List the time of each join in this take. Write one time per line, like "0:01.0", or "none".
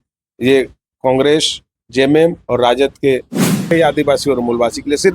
0:03.7